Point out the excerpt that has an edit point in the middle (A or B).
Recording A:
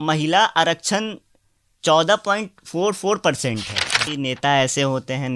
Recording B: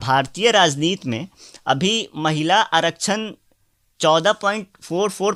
A